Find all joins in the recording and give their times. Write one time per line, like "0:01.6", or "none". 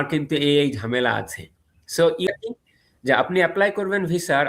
0:02.3